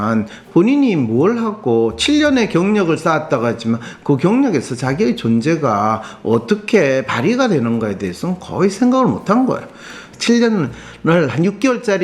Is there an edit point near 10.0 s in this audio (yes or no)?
yes